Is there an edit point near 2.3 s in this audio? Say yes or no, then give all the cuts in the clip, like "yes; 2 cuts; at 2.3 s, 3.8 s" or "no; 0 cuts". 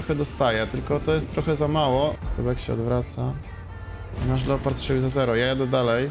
yes; 1 cut; at 2.3 s